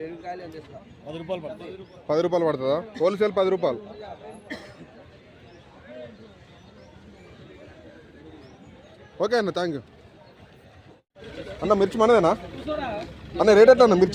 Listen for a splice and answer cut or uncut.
uncut